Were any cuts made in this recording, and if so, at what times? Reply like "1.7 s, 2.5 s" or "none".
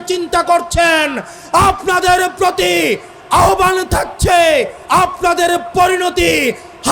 4.8 s